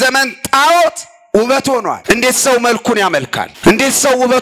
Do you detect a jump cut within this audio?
yes; 2 cuts; at 2.0 s, 3.4 s

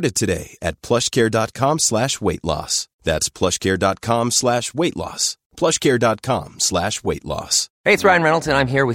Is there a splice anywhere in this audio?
yes; 1 cut; at 7.6 s

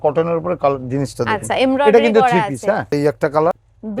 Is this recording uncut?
no; 1 cut; at 2.9 s

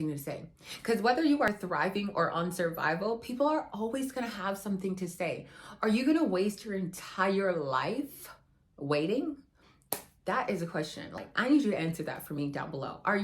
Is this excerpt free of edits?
no; 1 cut; at 11.3 s

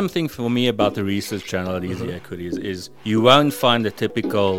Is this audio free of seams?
no; 1 cut; at 2.9 s

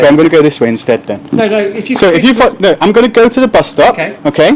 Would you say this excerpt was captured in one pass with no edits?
yes; 0 cuts

